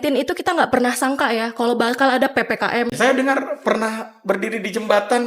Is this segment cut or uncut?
cut